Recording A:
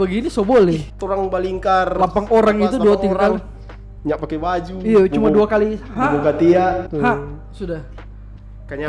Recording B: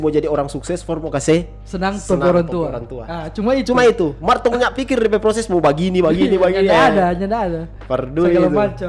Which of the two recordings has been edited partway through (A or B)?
A